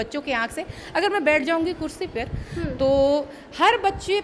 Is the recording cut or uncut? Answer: uncut